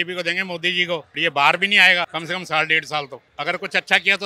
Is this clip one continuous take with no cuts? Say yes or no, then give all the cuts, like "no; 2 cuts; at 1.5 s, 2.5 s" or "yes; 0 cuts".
no; 3 cuts; at 1.1 s, 2.1 s, 3.2 s